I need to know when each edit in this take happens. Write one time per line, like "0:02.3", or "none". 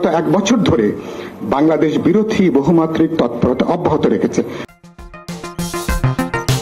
none